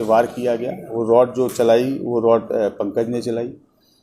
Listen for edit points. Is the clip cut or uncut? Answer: uncut